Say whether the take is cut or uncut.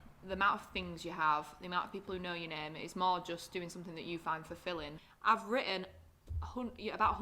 cut